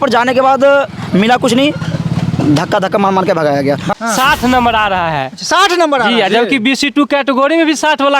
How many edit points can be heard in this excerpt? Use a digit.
1